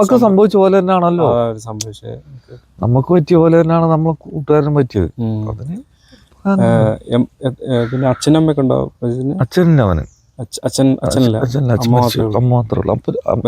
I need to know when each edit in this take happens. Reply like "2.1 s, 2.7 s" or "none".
none